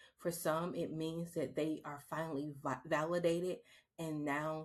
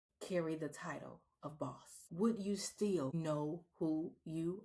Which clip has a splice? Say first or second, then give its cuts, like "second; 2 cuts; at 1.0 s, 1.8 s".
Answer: second; 2 cuts; at 1.9 s, 3.1 s